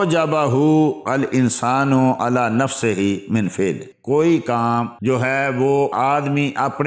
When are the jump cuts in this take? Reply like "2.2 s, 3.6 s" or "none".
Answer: 3.9 s, 4.9 s, 5.9 s